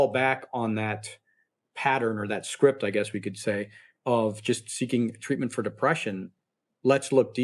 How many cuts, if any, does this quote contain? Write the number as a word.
zero